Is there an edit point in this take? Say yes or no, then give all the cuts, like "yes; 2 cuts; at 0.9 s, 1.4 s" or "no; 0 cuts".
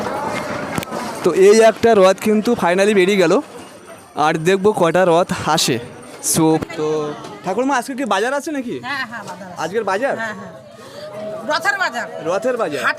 yes; 1 cut; at 6.6 s